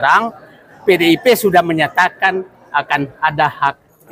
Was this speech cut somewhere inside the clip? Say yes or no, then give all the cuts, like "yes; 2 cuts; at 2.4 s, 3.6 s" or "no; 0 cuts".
no; 0 cuts